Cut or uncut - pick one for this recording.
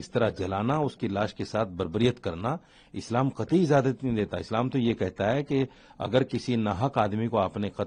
uncut